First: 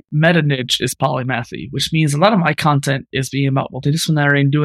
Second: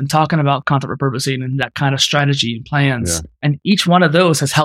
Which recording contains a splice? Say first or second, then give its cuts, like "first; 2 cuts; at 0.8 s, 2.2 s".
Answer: second; 1 cut; at 3.3 s